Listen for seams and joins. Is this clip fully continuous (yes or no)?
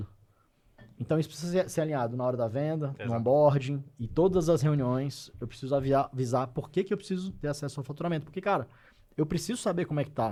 yes